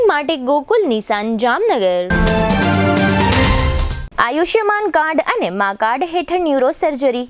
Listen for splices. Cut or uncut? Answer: cut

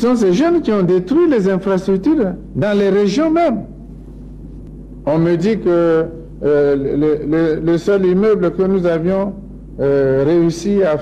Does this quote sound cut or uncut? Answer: cut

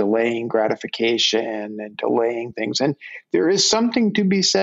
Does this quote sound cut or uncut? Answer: uncut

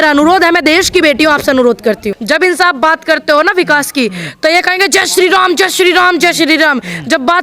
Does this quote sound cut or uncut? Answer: cut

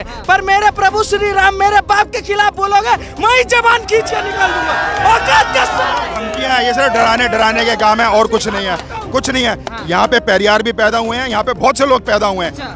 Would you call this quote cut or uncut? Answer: uncut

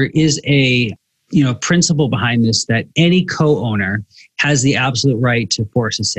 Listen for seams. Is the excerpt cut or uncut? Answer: uncut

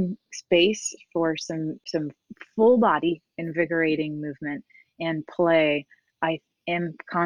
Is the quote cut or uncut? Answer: uncut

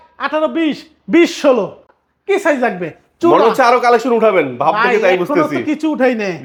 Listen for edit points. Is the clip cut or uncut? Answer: uncut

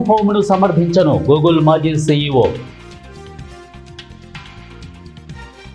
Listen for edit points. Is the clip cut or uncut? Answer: uncut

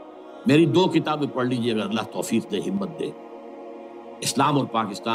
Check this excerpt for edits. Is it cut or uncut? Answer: uncut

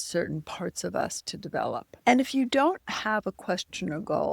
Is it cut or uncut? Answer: cut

